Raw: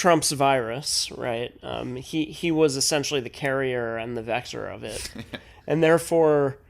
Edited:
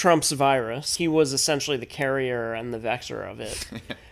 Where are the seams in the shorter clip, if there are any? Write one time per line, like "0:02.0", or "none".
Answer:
0:00.9

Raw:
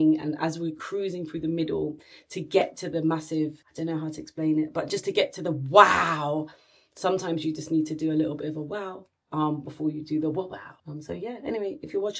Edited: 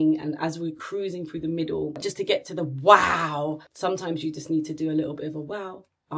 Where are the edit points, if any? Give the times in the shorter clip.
0:02.0
0:03.7

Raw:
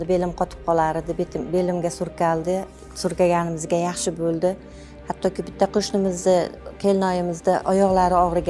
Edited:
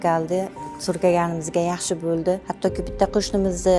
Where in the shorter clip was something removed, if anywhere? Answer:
0:02.5

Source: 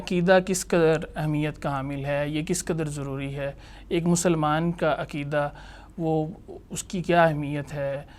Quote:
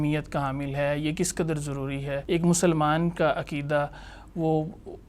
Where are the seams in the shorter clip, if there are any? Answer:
0:02.2

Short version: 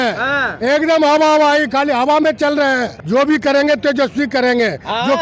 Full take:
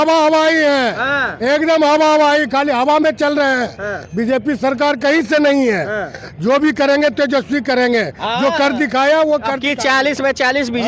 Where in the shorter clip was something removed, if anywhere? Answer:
0:02.9

